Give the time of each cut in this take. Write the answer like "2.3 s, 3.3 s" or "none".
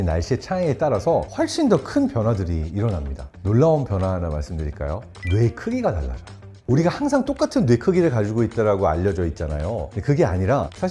none